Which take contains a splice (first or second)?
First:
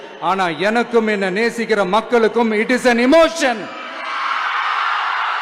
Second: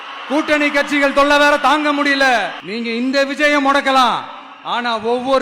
second